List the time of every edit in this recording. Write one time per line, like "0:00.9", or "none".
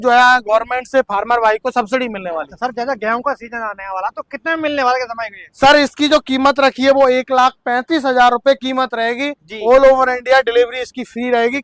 none